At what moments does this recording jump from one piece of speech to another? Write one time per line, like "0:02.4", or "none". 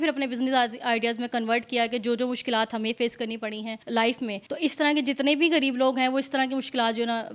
0:03.7
0:04.4